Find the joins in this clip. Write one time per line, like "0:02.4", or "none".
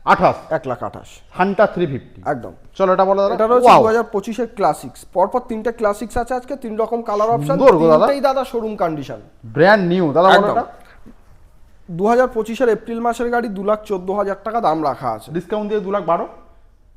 none